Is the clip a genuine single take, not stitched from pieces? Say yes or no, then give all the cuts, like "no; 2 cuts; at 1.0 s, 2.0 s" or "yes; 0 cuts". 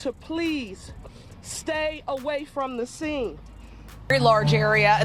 no; 1 cut; at 3.9 s